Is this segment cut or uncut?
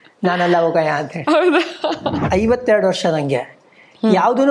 cut